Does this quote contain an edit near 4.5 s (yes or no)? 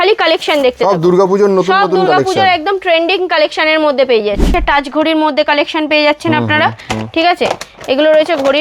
yes